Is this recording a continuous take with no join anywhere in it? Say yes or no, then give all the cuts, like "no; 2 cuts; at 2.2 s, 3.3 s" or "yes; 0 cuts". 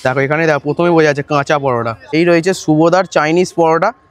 no; 1 cut; at 2.1 s